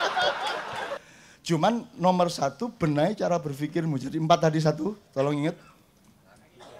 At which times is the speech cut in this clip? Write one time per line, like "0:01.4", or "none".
0:01.0